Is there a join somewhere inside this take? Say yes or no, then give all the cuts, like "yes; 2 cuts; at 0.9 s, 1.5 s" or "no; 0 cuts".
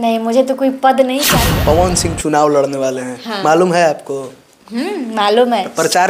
yes; 1 cut; at 1.3 s